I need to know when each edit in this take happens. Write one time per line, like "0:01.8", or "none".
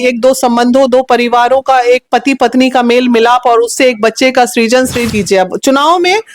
0:05.0